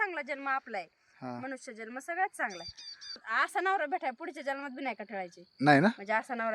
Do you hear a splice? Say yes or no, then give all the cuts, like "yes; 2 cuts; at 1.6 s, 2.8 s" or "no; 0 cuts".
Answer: yes; 1 cut; at 3.2 s